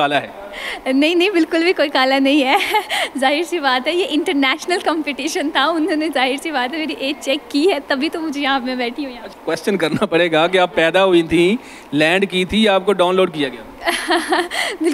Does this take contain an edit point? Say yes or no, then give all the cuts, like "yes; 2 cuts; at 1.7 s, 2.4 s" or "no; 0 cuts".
no; 0 cuts